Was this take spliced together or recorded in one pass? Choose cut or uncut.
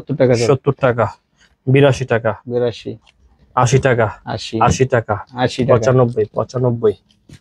uncut